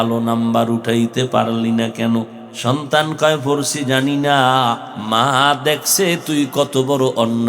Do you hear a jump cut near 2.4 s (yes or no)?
yes